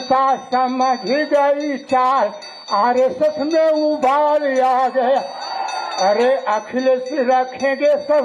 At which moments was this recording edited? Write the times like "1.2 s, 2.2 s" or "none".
5.9 s